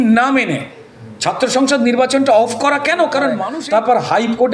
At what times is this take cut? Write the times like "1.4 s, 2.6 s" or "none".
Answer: 3.4 s

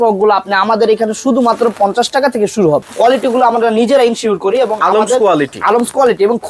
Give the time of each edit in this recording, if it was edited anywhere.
2.9 s

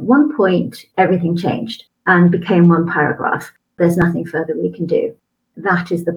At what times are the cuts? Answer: 0.8 s, 1.9 s, 3.6 s

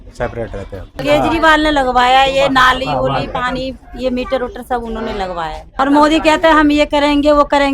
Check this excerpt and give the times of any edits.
0.9 s, 5.7 s

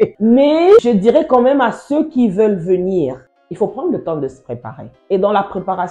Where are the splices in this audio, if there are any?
none

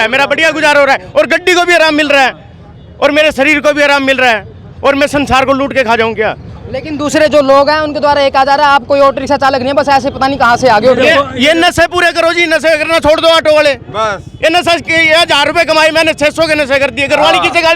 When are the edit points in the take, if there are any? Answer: none

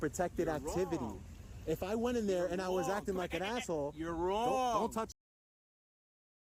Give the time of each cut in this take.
none

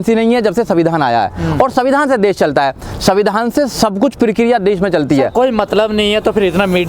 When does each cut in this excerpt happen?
none

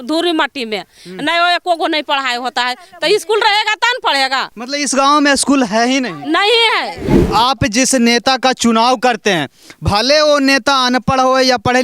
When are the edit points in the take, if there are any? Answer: 4.6 s, 7.2 s

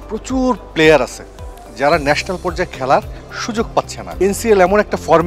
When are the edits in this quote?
4.0 s

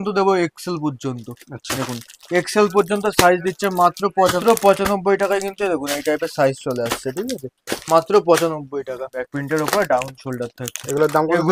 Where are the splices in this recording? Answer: 4.4 s, 9.2 s

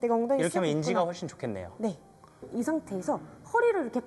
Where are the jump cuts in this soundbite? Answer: 2.4 s

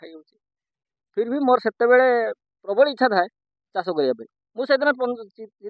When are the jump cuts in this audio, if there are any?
4.4 s

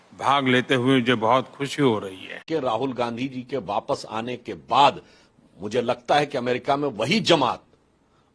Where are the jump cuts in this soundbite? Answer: 2.4 s

